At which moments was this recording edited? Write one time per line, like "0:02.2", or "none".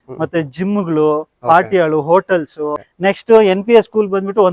0:02.8

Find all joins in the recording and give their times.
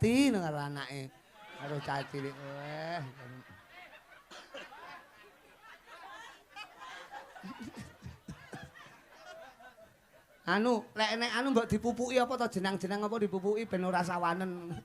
none

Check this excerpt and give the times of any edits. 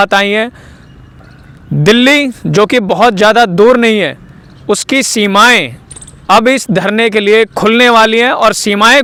none

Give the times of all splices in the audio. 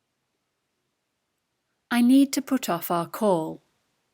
0:01.6

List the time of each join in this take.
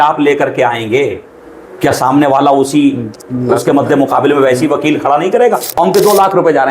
0:05.8

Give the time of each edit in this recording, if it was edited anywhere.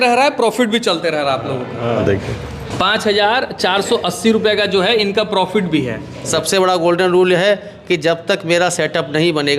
0:02.0
0:06.3

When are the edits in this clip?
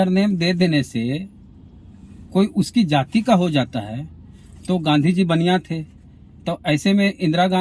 none

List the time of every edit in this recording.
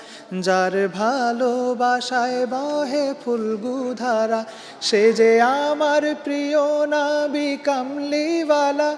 none

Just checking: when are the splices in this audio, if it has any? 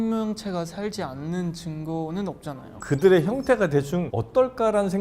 0:02.8

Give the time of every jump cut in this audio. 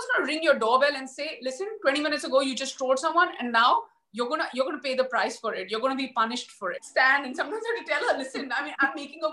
0:06.8

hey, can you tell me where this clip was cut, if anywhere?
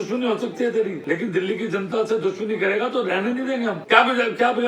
0:01.0
0:03.8

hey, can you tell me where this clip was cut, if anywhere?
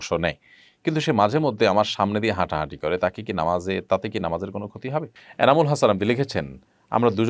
0:05.2

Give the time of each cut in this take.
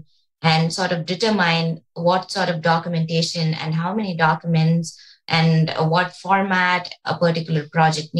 0:07.0

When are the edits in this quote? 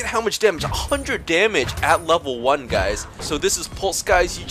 0:03.3

